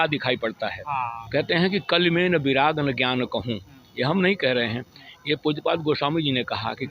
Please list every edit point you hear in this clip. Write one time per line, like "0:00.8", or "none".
0:01.2